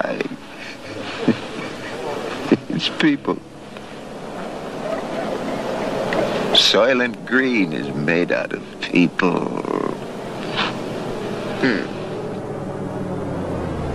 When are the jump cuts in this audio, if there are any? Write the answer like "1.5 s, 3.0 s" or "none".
7.5 s